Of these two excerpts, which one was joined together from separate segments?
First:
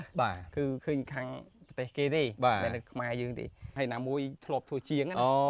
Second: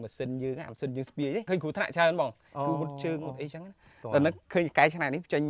first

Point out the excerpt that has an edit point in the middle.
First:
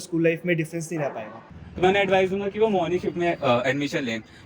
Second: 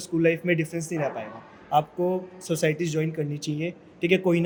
first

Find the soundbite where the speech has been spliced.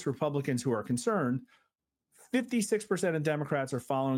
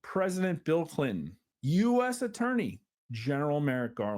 second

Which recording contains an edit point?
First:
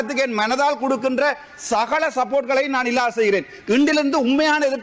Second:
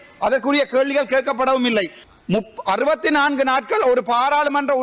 second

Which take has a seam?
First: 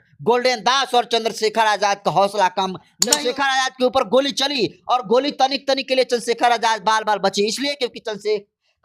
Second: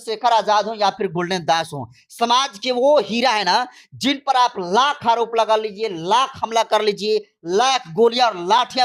first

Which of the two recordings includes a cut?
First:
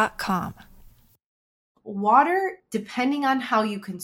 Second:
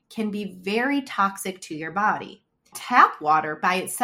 first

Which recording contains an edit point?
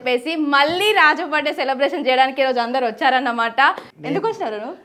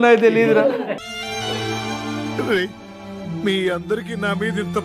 first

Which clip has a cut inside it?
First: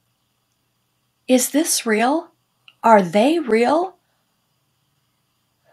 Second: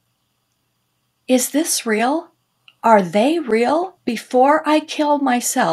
second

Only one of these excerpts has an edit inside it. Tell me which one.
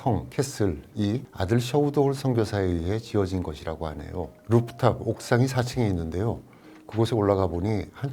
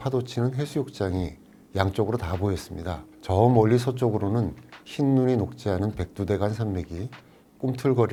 first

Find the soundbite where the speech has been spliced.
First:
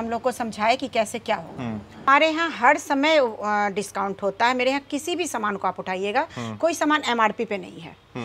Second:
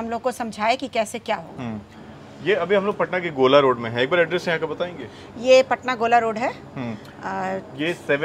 first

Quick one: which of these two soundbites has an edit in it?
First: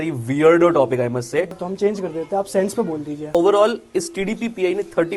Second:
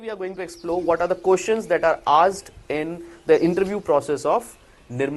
first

